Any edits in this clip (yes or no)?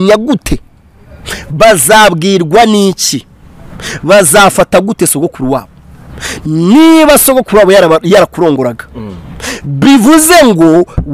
no